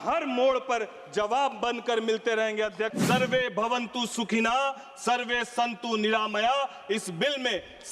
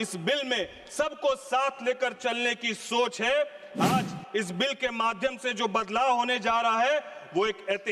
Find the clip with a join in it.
first; 1 cut; at 3.0 s

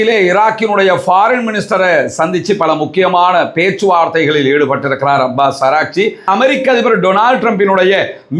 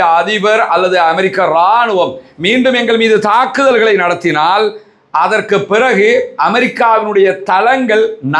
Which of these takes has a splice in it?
first; 1 cut; at 6.2 s

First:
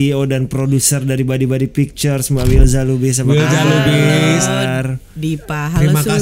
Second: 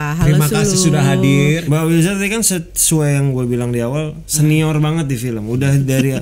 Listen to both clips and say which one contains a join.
second; 1 cut; at 1.6 s

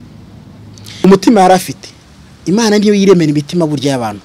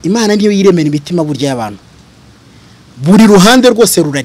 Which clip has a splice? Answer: first; 1 cut; at 1.0 s

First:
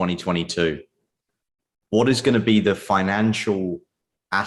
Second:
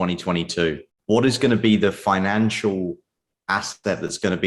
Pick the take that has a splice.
second; 1 cut; at 0.9 s

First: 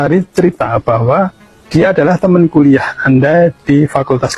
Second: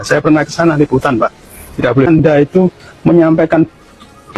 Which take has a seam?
second; 1 cut; at 2.1 s

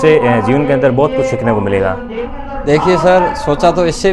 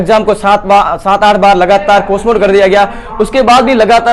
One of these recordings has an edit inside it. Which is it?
first; 1 cut; at 2.3 s

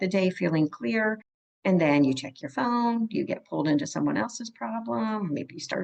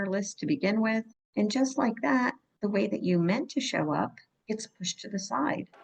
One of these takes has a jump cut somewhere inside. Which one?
second; 3 cuts; at 1.2 s, 2.5 s, 4.3 s

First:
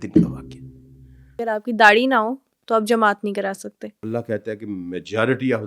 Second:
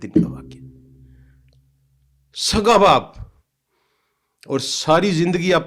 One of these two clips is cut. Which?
first; 2 cuts; at 1.4 s, 4.0 s

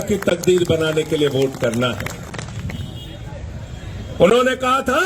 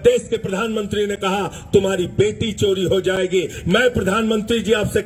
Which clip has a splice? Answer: first; 1 cut; at 2.5 s

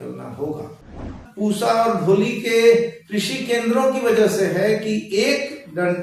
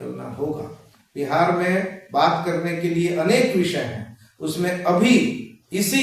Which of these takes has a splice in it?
first; 1 cut; at 1.2 s

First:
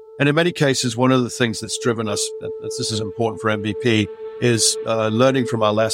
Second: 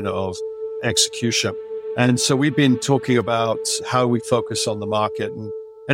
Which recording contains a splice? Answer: second; 2 cuts; at 1.7 s, 3.7 s

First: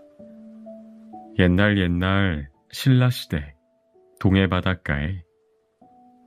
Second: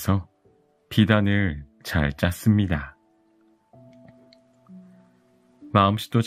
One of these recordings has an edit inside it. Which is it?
first; 1 cut; at 1.0 s

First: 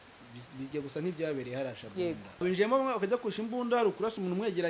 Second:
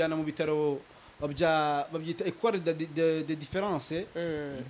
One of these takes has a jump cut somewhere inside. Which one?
first; 1 cut; at 2.4 s

